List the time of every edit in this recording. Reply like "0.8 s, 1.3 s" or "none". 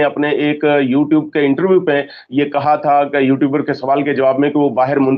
none